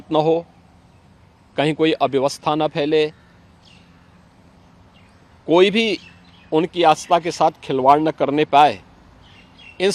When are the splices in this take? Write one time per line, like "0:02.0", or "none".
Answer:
none